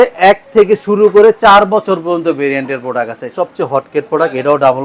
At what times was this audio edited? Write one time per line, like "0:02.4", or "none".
0:03.3

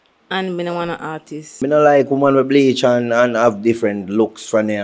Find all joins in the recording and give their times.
0:01.5

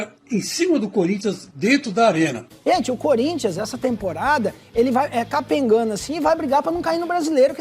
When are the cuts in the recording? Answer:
0:02.5

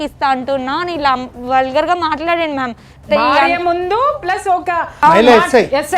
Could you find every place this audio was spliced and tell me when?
0:04.9

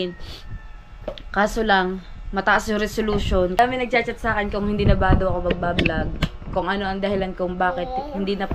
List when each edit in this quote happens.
0:03.6

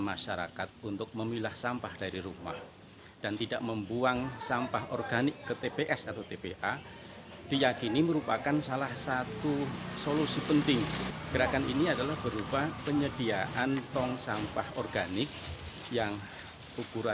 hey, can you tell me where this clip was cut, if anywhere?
0:11.1

